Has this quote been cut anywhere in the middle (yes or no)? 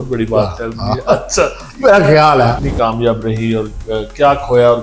yes